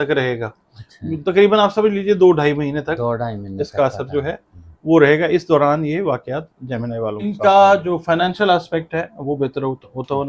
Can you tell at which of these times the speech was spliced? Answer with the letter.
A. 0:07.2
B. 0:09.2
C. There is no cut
A